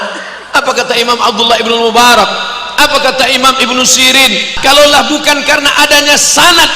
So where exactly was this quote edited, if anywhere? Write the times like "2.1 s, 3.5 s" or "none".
4.4 s